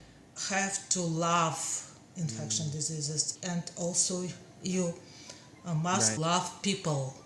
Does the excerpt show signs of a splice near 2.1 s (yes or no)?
no